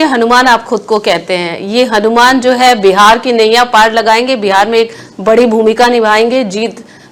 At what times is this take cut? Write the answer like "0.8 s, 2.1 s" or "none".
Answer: none